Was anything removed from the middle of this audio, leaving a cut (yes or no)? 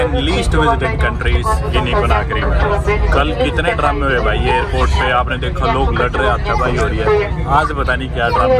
no